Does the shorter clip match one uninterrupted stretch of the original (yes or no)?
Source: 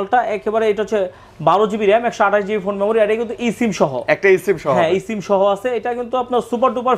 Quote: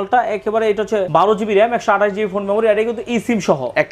no